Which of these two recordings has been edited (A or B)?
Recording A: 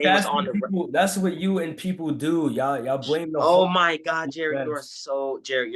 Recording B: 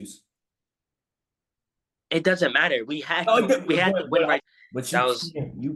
B